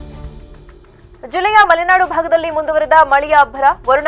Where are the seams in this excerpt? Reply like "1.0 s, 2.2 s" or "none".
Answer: none